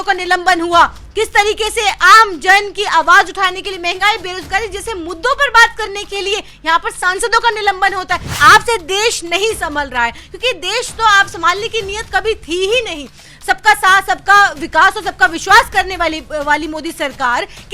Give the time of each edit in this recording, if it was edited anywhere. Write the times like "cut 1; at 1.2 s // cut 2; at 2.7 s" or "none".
cut 1; at 8.3 s

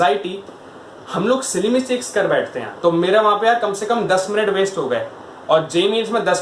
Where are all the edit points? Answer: cut 1; at 2.6 s

